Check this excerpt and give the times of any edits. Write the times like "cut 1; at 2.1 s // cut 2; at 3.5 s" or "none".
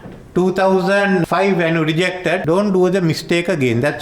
cut 1; at 1.2 s // cut 2; at 2.4 s